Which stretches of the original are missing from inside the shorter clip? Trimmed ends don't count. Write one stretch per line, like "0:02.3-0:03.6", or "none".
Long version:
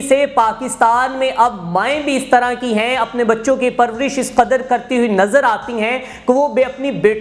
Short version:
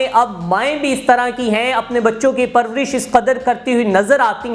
none